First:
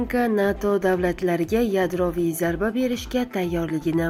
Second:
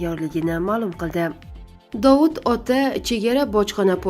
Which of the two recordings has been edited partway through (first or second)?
second